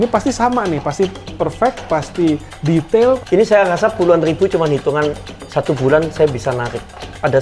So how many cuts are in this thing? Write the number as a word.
one